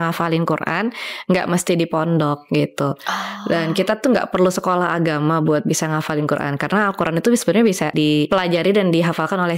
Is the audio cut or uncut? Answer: cut